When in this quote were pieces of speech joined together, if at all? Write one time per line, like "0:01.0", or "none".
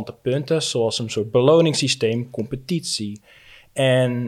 none